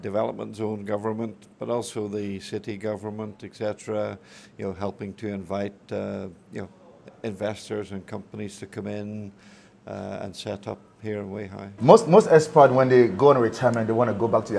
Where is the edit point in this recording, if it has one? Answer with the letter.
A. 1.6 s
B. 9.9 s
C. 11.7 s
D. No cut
C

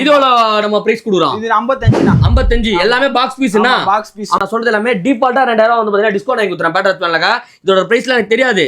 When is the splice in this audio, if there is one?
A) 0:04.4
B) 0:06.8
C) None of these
A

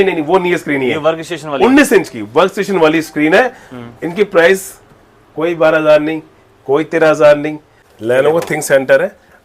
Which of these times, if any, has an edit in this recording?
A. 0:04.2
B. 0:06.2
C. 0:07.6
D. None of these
C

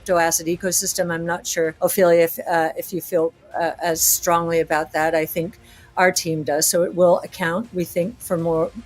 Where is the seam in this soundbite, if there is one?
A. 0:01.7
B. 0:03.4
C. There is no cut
A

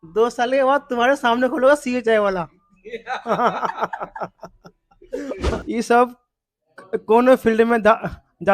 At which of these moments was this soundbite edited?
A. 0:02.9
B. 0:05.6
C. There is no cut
B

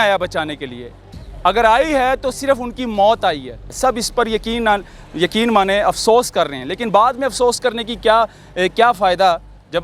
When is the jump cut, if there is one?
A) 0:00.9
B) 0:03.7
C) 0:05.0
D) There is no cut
B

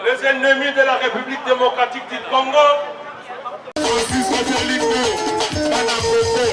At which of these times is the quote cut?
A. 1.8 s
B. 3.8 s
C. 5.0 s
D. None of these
B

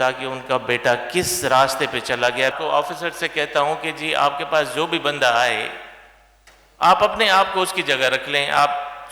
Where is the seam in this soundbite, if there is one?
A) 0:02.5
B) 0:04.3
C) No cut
A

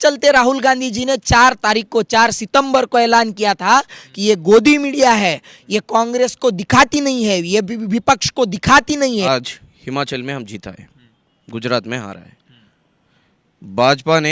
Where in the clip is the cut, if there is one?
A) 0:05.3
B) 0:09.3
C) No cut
B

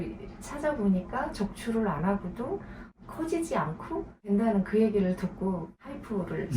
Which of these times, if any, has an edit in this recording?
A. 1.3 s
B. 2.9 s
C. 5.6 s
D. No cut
B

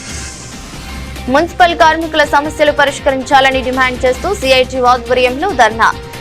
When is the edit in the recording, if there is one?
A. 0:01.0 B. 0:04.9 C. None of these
A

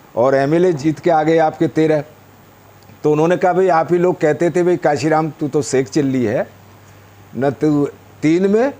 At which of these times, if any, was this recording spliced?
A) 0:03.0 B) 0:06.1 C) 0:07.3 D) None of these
D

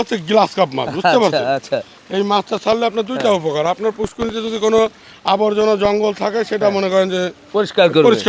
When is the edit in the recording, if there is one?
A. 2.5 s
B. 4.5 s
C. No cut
C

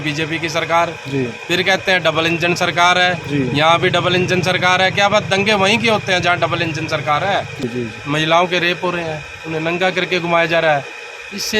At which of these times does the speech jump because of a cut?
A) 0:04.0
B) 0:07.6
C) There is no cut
B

